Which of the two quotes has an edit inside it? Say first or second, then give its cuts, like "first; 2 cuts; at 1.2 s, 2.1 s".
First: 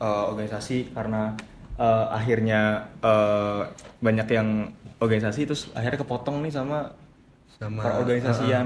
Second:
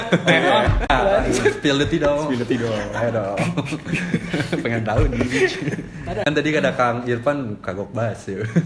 second; 2 cuts; at 0.9 s, 6.2 s